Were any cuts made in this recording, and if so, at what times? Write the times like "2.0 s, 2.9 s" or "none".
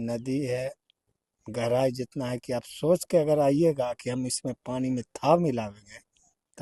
none

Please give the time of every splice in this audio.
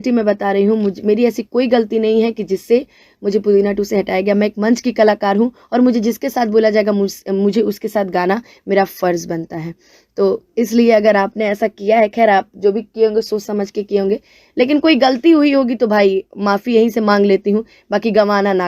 none

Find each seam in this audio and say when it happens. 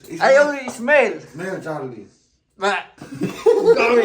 3.0 s

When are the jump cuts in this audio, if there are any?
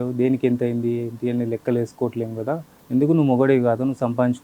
2.7 s

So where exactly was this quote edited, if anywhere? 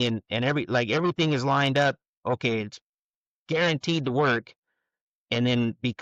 none

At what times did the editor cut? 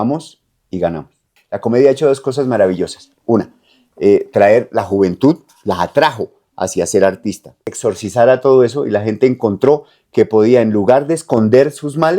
1.3 s, 7.8 s

